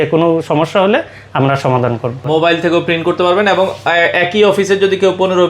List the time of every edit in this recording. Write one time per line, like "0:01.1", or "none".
0:02.1